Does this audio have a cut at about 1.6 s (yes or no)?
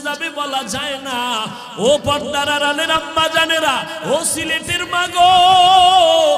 yes